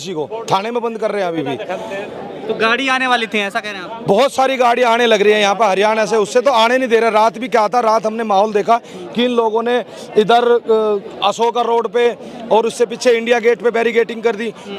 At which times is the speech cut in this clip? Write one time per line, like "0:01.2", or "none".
none